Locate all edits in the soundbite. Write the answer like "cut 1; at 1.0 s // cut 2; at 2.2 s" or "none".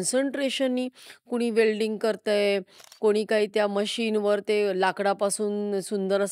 none